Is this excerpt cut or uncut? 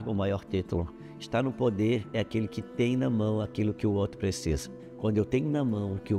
uncut